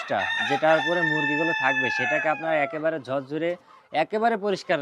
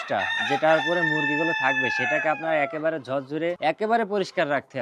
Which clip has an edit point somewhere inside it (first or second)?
second